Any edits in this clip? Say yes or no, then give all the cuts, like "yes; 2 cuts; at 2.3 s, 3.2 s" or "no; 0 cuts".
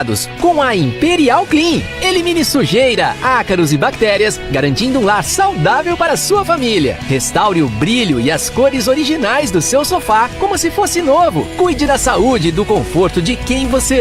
no; 0 cuts